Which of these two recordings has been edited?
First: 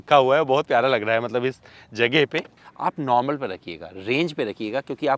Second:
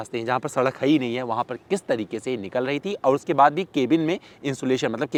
first; 1 cut; at 2.5 s

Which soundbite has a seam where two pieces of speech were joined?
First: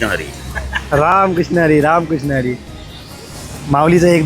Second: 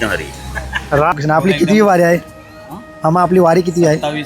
second; 1 cut; at 1.1 s

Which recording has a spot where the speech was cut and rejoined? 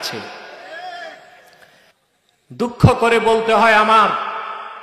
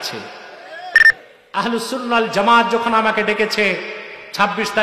second; 1 cut; at 1.0 s

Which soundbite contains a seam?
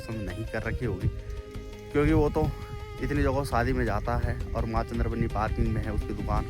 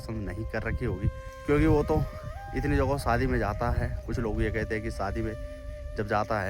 second; 2 cuts; at 1.3 s, 4.0 s

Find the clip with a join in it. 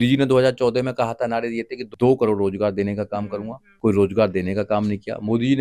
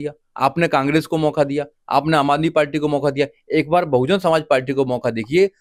first; 2 cuts; at 1.8 s, 3.6 s

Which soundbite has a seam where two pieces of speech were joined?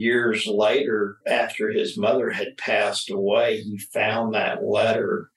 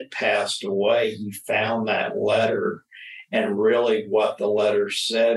first; 1 cut; at 1.2 s

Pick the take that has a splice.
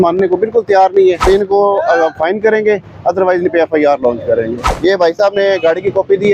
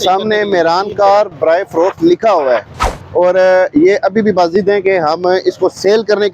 first; 2 cuts; at 1.2 s, 4.6 s

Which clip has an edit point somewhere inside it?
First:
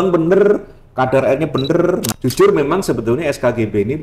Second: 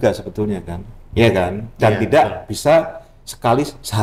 first; 1 cut; at 2.1 s

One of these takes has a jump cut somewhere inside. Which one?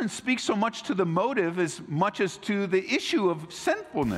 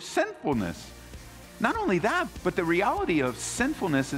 second; 1 cut; at 2.2 s

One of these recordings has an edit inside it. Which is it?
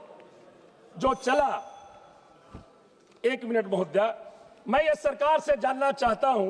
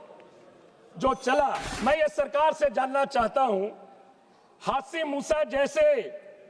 second; 1 cut; at 1.7 s

